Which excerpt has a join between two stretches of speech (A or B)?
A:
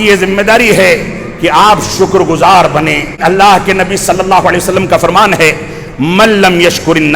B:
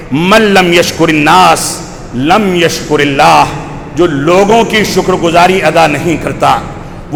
A